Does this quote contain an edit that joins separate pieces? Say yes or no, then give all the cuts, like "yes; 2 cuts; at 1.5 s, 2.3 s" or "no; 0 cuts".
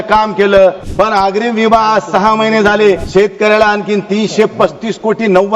yes; 2 cuts; at 0.8 s, 3.0 s